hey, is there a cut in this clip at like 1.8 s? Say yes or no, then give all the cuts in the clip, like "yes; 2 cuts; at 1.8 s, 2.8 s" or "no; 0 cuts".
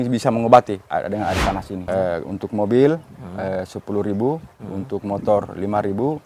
yes; 1 cut; at 1.8 s